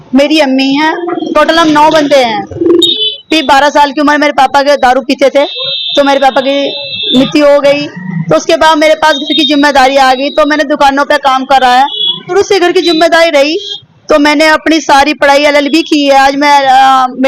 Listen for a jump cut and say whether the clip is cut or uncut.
cut